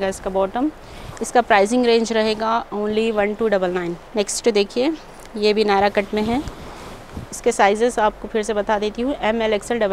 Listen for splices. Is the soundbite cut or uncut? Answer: uncut